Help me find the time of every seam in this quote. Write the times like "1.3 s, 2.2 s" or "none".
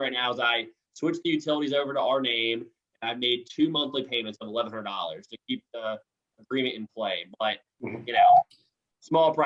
none